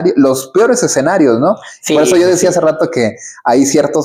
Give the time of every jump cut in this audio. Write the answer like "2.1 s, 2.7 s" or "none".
none